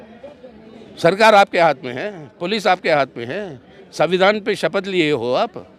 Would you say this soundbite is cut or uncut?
uncut